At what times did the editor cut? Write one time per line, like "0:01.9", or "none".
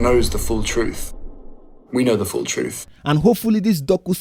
0:02.9